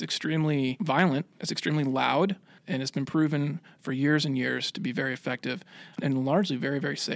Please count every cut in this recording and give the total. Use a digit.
3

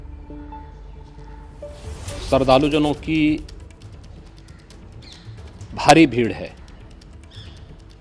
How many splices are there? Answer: 1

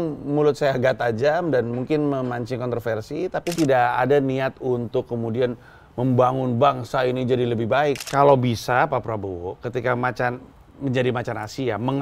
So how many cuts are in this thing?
2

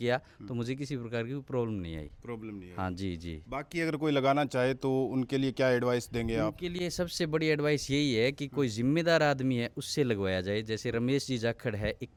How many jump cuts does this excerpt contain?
0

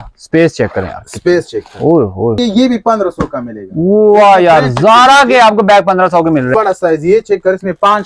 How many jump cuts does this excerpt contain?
2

